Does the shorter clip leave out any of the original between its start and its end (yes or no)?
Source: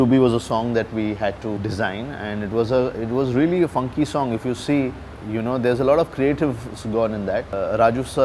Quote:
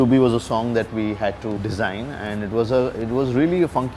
no